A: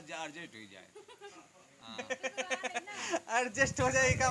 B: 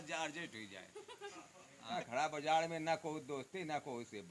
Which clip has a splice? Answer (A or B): B